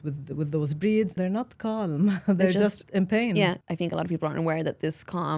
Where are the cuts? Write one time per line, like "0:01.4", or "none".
0:01.2
0:03.6